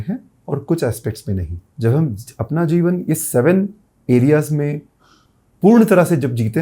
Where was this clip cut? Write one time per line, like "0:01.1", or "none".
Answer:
0:01.6